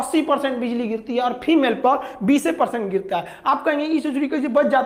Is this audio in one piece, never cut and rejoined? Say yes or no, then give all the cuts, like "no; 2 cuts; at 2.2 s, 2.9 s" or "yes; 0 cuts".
yes; 0 cuts